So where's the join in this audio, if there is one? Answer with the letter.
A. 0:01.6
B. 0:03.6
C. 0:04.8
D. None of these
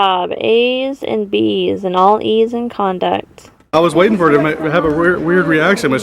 B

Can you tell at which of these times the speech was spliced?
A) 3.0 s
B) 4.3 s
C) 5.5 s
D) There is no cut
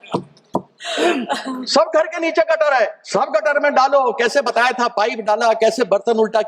A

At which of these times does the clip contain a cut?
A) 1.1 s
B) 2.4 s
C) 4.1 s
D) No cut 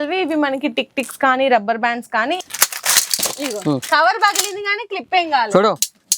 B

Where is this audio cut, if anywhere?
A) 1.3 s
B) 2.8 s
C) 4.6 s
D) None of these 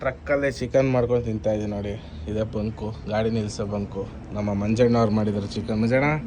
D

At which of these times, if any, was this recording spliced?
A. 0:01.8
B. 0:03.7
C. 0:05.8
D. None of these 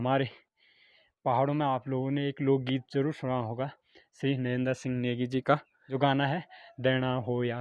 C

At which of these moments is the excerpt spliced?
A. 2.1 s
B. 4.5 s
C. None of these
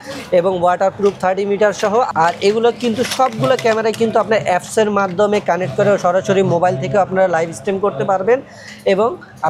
A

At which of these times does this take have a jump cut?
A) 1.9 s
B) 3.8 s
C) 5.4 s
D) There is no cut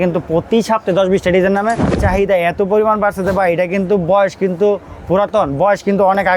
A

